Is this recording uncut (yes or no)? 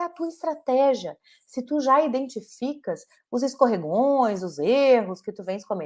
yes